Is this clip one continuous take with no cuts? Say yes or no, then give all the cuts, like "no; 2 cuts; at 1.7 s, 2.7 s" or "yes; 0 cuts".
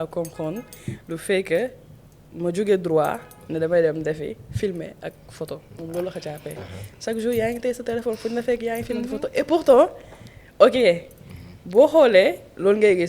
yes; 0 cuts